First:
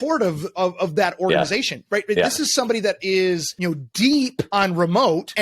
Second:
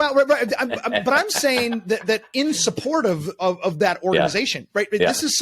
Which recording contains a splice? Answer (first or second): first